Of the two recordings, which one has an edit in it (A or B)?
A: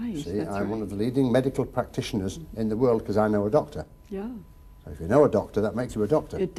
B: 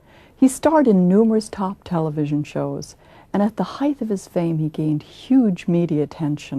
B